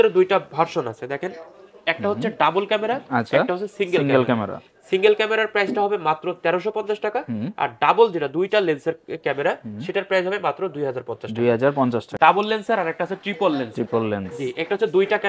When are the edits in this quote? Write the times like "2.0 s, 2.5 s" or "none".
12.1 s